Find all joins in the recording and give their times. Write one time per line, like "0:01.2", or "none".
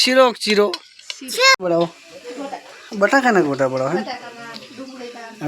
0:01.6